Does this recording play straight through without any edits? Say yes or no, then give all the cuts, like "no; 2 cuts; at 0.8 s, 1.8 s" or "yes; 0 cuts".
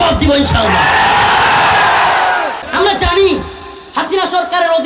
no; 1 cut; at 2.7 s